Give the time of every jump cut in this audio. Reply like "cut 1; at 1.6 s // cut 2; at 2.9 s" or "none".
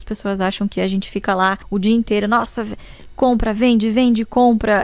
cut 1; at 1.6 s

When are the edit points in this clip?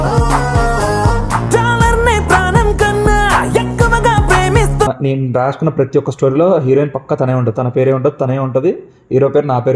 cut 1; at 4.9 s

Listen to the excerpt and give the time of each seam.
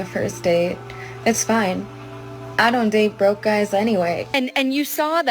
cut 1; at 4.3 s

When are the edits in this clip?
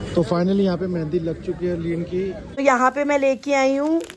cut 1; at 2.4 s

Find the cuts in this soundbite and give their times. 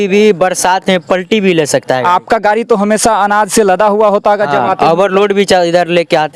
none

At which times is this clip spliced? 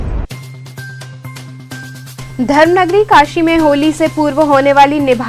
none

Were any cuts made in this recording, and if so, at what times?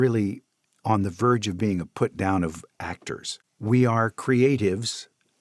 cut 1; at 3.3 s

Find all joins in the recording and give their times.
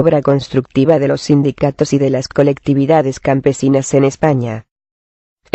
cut 1; at 3.4 s

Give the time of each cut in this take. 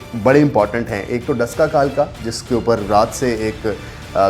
none

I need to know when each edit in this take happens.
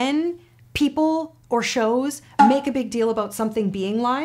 none

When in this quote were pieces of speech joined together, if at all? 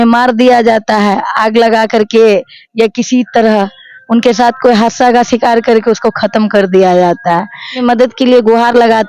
cut 1; at 7.8 s

